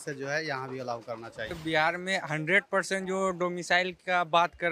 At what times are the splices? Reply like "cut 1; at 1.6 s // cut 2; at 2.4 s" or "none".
cut 1; at 1.6 s